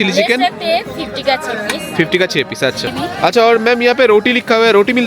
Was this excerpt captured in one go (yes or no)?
no